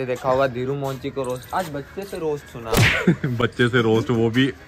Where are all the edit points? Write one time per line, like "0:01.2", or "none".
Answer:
none